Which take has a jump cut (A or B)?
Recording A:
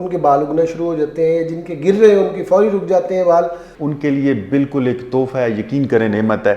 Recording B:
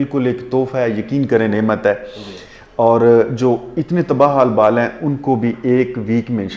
A